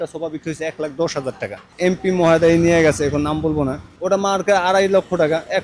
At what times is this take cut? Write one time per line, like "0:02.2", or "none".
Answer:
0:01.7
0:03.9